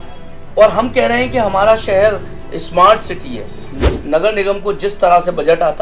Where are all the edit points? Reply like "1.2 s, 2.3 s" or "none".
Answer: 3.8 s